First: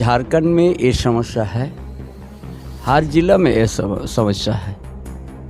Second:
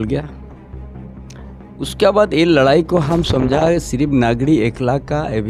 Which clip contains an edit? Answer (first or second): first